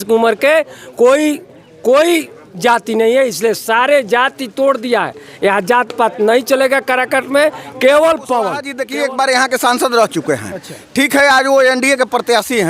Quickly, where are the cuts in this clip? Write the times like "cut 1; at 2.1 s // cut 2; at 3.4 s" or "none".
cut 1; at 8.7 s